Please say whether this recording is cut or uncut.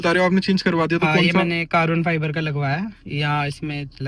uncut